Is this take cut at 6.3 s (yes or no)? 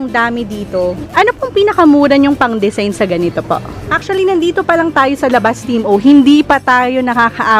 no